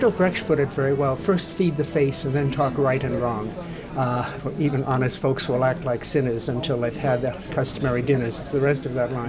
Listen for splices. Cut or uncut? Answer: uncut